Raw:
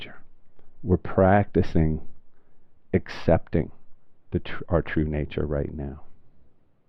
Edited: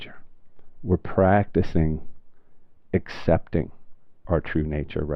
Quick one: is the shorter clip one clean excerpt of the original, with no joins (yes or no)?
no